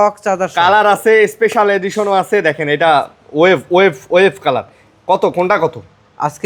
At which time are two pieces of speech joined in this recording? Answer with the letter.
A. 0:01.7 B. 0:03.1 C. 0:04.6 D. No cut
D